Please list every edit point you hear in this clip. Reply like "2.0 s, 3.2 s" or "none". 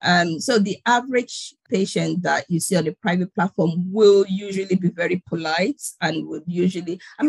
1.6 s

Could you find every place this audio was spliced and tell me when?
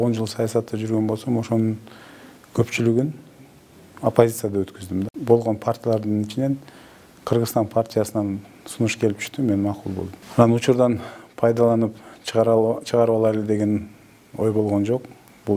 5.1 s, 10.2 s

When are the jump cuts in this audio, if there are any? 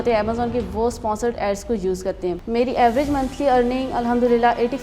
2.4 s

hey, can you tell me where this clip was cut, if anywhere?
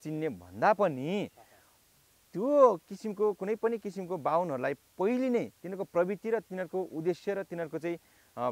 none

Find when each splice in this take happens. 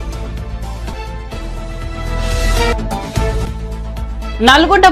0.9 s

